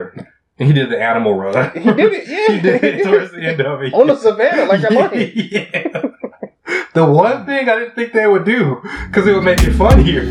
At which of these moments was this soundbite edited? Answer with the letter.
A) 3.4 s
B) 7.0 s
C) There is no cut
C